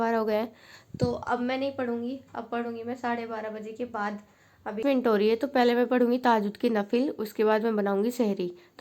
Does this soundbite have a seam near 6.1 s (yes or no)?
no